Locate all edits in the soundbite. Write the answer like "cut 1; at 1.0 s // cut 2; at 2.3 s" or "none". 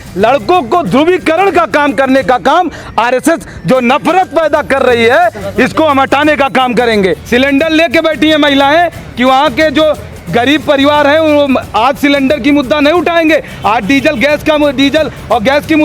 cut 1; at 7.2 s

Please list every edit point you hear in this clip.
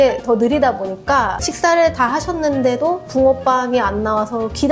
none

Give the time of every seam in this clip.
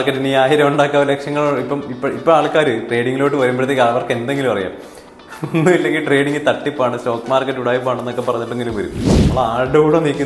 cut 1; at 9.2 s

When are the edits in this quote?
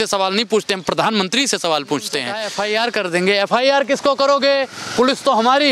cut 1; at 2.5 s

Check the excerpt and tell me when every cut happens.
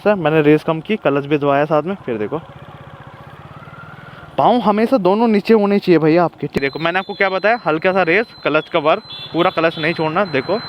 cut 1; at 6.5 s

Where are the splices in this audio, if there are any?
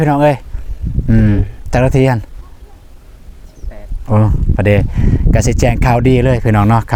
none

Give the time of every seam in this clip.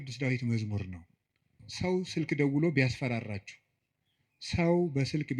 cut 1; at 1.6 s

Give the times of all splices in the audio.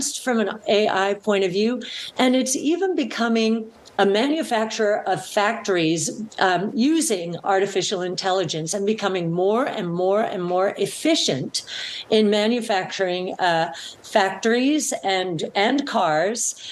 none

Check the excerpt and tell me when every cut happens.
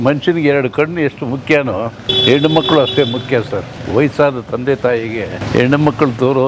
cut 1; at 2.1 s // cut 2; at 5.4 s

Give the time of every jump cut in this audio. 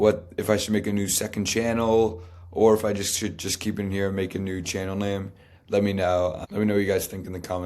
cut 1; at 6.4 s

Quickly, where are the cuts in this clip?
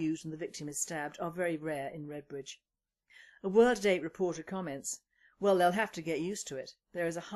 none

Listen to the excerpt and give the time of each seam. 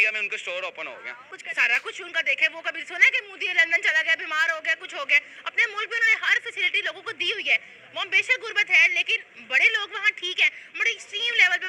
cut 1; at 1.4 s

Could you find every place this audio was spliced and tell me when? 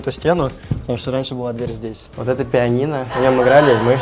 cut 1; at 2.1 s // cut 2; at 3.1 s

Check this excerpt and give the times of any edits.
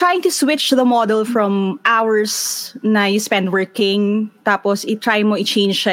none

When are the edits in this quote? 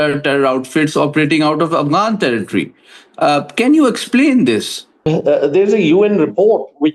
cut 1; at 4.9 s

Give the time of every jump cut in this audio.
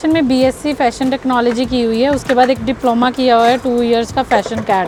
none

